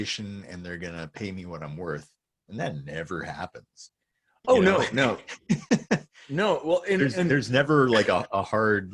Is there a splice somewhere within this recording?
no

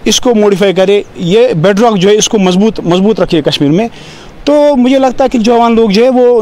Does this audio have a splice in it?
no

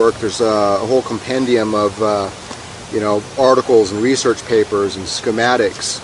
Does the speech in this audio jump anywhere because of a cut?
yes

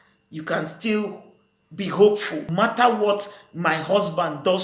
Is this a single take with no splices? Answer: no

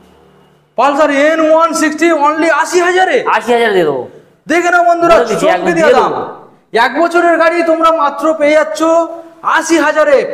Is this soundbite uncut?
yes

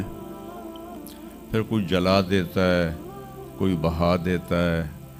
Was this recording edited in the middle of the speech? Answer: no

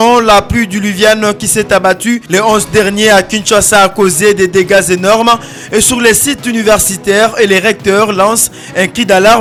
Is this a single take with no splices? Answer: yes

